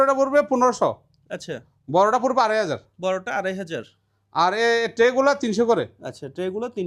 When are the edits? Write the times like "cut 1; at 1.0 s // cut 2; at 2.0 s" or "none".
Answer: none